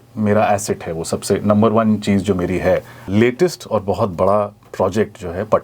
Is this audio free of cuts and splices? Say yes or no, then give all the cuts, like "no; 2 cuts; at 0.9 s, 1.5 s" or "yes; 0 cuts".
no; 1 cut; at 3.1 s